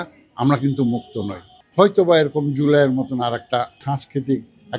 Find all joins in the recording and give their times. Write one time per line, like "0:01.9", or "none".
0:01.6
0:03.8